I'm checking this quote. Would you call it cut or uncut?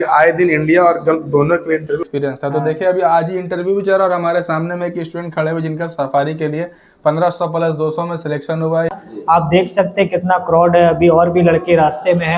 cut